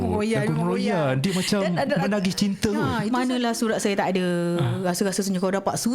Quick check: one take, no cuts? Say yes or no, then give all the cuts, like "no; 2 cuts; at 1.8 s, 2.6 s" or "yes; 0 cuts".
no; 1 cut; at 3.1 s